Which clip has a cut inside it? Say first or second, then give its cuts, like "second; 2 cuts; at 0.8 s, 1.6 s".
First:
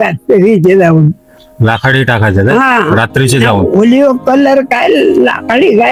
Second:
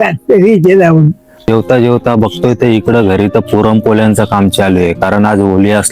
second; 1 cut; at 1.5 s